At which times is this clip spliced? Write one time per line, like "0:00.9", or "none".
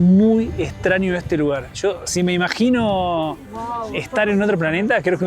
none